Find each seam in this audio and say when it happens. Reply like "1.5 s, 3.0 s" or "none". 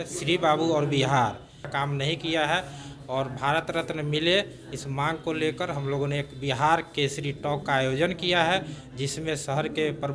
1.7 s